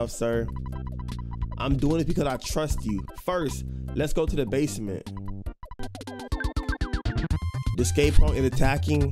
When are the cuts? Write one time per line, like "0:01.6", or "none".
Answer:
0:05.7